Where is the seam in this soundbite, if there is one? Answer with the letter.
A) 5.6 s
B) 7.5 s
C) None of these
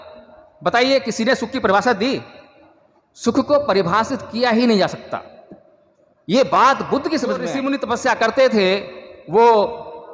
B